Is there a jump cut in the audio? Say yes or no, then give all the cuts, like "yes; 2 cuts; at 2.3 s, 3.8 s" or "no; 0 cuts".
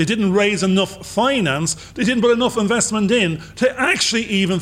no; 0 cuts